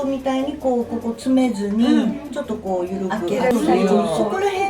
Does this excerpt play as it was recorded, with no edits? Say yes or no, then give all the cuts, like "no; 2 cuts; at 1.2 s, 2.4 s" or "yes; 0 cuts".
no; 1 cut; at 3.5 s